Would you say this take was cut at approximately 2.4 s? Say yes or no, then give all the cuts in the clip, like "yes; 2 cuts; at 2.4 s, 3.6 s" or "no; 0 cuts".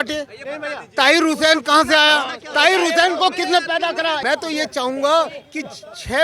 no; 1 cut; at 4.2 s